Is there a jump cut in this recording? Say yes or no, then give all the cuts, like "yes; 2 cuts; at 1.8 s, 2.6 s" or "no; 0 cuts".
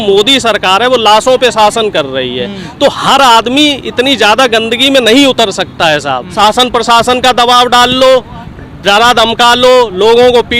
yes; 1 cut; at 6.2 s